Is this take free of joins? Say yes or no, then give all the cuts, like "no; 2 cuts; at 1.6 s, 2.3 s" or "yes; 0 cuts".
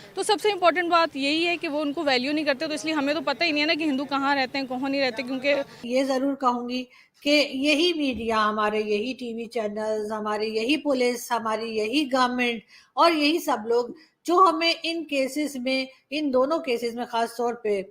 no; 1 cut; at 5.8 s